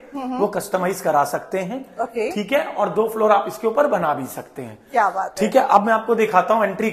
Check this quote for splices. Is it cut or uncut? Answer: uncut